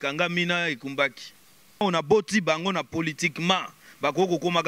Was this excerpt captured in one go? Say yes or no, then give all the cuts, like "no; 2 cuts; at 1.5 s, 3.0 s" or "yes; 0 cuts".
no; 1 cut; at 1.8 s